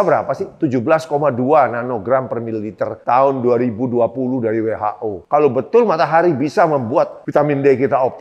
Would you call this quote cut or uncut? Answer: uncut